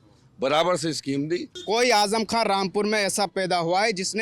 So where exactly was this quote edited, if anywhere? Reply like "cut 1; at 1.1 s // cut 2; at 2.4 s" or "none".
cut 1; at 1.5 s